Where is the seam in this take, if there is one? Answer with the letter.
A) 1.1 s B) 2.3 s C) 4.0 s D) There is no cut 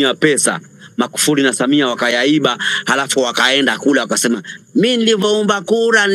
D